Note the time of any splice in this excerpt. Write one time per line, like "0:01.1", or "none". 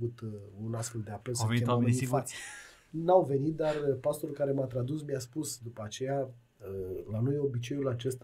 none